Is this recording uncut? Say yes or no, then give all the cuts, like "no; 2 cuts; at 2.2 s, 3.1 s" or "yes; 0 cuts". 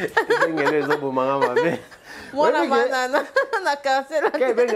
yes; 0 cuts